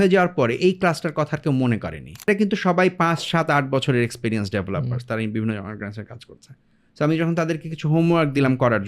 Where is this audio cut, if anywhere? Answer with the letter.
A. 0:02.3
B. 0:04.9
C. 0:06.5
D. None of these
A